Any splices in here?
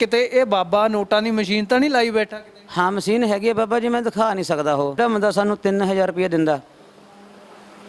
yes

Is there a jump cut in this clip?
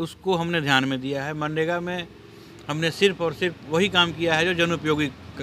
no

